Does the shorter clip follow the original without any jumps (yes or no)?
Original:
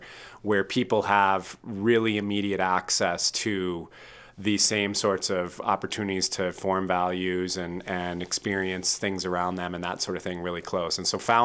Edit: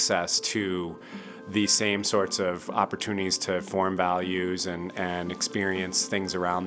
yes